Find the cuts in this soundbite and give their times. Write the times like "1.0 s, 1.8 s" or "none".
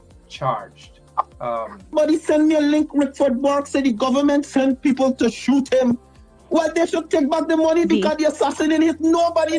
1.9 s